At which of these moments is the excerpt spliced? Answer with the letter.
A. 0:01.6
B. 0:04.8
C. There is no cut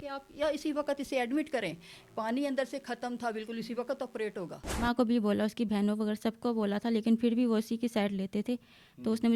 B